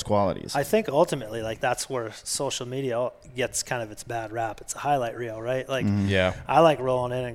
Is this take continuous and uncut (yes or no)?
no